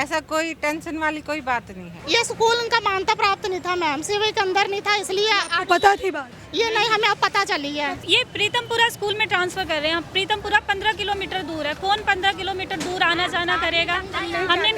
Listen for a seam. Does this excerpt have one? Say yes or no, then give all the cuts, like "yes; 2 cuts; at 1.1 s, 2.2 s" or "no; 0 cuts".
yes; 2 cuts; at 1.9 s, 8.0 s